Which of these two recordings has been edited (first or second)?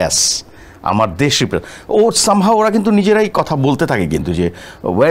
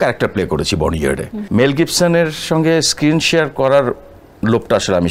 second